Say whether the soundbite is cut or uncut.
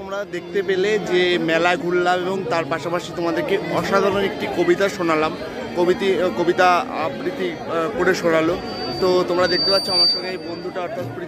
uncut